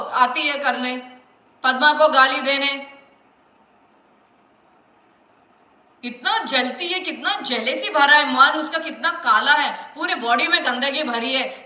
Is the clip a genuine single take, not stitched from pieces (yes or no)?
yes